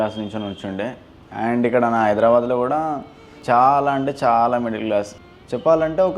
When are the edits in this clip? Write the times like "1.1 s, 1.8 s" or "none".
3.3 s, 5.2 s